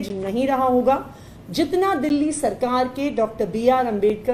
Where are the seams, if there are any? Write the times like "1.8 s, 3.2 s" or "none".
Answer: none